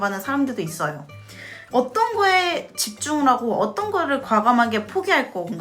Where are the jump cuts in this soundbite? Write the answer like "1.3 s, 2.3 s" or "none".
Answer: 1.5 s